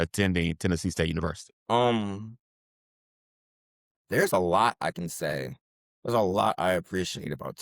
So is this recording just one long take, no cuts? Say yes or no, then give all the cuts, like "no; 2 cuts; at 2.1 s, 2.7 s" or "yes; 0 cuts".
no; 1 cut; at 1.5 s